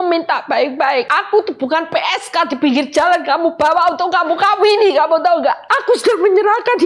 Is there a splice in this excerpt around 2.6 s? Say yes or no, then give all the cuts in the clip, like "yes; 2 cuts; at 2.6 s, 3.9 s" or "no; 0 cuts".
no; 2 cuts; at 1.2 s, 5.7 s